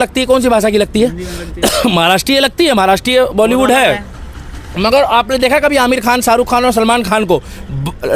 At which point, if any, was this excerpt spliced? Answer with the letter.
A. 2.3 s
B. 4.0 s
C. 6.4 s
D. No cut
D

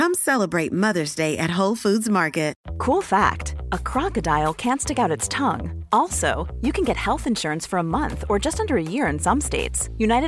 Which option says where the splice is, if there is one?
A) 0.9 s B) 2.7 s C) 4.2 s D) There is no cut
B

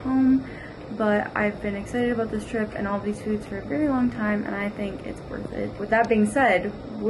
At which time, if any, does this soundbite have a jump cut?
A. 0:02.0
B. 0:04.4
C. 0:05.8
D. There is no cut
C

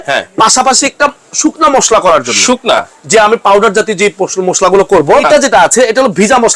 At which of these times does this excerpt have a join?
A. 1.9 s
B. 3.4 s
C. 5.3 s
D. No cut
C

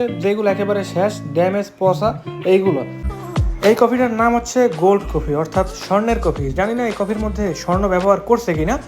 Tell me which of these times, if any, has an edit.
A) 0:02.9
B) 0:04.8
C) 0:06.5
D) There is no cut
A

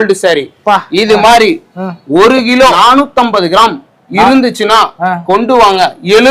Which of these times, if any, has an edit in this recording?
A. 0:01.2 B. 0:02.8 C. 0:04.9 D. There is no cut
B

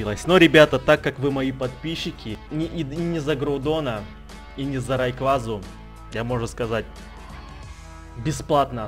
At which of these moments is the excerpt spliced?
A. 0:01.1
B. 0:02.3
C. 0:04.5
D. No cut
B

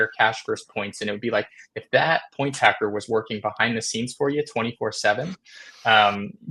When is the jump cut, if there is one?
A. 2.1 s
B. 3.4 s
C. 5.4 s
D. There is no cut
D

